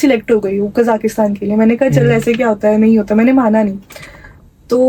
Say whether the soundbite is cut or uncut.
uncut